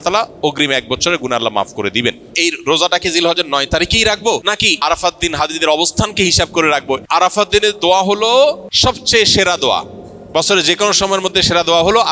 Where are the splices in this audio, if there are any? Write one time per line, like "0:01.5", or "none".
0:02.3
0:04.8
0:07.0
0:08.7